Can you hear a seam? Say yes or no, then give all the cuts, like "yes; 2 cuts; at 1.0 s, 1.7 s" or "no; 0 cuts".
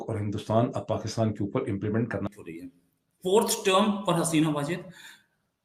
yes; 1 cut; at 2.3 s